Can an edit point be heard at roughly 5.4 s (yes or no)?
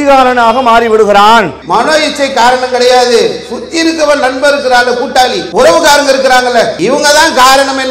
yes